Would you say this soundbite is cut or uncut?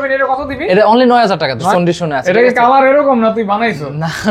cut